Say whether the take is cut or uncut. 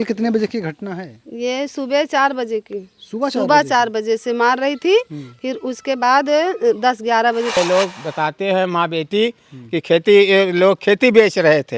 cut